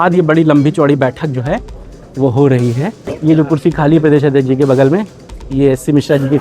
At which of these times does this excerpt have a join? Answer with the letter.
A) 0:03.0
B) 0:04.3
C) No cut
A